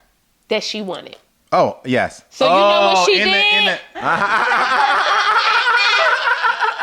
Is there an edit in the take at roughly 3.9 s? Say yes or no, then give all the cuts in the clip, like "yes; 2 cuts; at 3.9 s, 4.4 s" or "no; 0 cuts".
yes; 1 cut; at 3.9 s